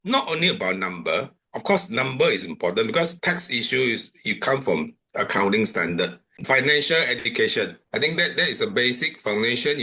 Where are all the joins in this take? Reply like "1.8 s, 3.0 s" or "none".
6.4 s